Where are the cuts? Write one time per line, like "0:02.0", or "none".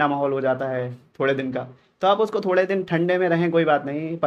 none